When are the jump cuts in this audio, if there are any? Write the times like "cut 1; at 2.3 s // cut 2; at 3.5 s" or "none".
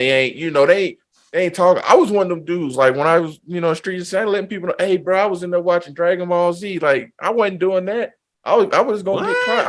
none